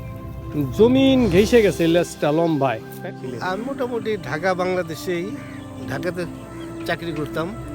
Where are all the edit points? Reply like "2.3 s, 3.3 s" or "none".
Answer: 2.9 s